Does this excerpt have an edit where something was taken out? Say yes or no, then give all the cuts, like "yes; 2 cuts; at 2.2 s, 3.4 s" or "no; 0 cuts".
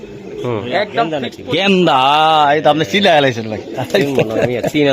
yes; 1 cut; at 1.1 s